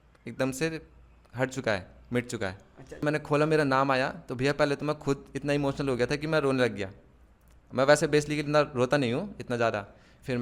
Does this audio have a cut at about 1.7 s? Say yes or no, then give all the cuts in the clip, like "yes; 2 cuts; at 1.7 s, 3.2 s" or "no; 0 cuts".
no; 1 cut; at 3.0 s